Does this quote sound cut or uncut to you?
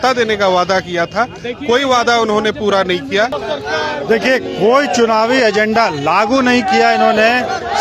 cut